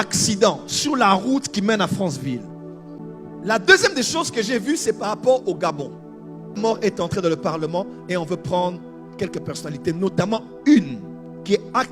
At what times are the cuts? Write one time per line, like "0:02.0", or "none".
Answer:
0:03.0
0:06.6

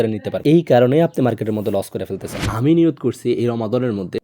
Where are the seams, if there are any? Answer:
0:02.4

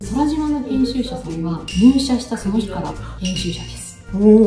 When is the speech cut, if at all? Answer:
none

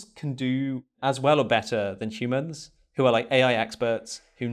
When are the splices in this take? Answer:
0:00.9

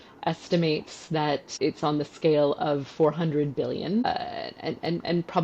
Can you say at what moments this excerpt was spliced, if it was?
0:01.5
0:04.0

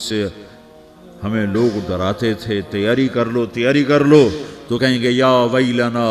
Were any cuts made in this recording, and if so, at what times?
none

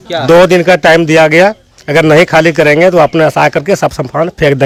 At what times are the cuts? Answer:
none

